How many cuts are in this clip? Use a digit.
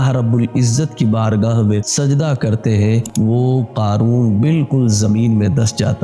1